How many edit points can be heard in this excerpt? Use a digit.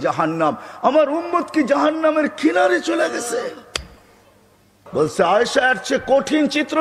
1